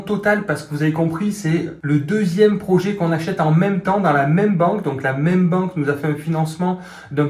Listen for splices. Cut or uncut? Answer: uncut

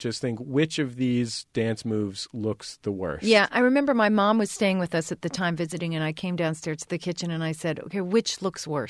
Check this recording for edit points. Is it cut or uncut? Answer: uncut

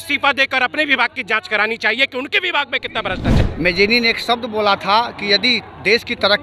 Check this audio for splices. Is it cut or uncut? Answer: cut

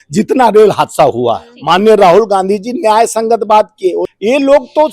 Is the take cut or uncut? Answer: cut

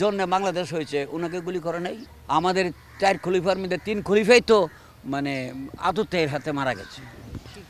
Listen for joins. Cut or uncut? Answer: uncut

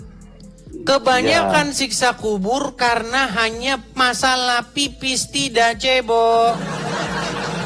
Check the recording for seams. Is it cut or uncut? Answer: uncut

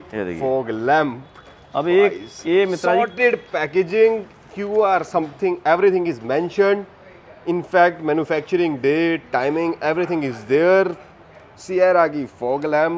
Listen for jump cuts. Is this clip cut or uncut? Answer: uncut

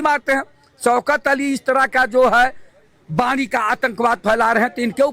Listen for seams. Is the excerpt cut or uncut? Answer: uncut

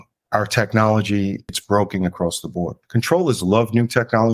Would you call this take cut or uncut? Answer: cut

